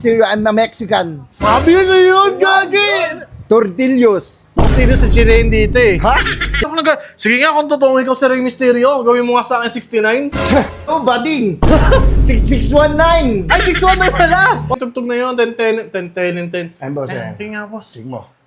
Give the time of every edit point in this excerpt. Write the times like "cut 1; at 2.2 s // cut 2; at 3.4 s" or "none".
cut 1; at 6.7 s // cut 2; at 14.7 s